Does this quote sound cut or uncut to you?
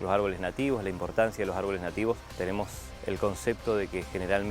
cut